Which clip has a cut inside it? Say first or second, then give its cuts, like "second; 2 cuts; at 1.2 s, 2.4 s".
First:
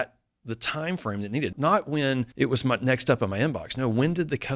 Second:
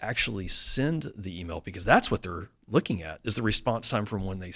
first; 2 cuts; at 1.5 s, 2.3 s